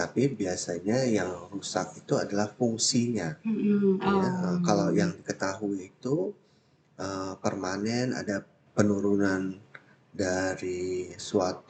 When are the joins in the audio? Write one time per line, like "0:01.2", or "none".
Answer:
none